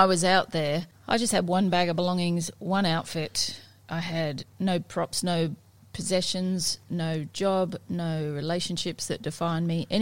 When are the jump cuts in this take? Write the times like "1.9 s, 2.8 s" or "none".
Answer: 0.9 s